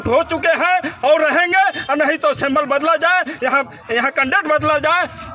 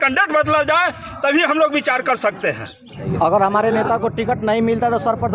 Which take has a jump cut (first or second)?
second